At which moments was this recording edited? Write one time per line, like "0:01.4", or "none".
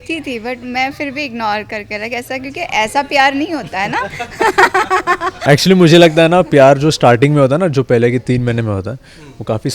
0:05.4